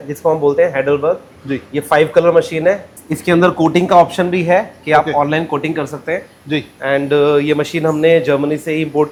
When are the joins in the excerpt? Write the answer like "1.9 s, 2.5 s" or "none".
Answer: none